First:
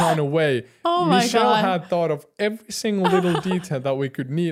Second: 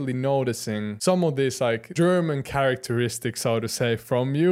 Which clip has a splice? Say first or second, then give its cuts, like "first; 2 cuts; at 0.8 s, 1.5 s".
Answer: second; 2 cuts; at 0.9 s, 1.9 s